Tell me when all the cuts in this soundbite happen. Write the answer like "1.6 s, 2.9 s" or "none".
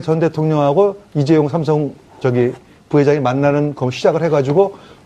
1.0 s